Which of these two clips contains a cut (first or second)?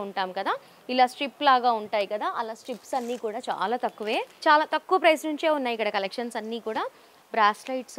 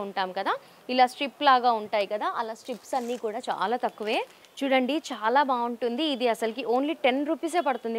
first